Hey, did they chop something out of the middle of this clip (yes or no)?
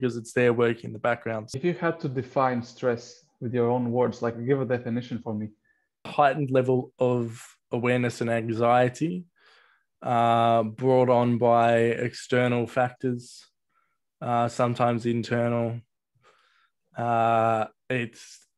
yes